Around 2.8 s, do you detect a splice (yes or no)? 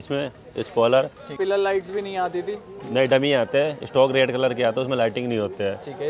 no